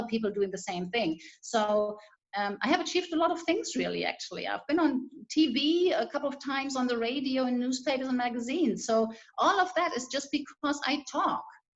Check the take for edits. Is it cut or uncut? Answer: cut